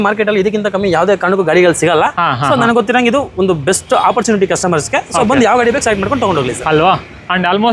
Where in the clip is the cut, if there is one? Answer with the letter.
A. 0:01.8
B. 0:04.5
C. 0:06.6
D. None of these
D